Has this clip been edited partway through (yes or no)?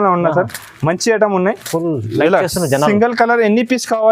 no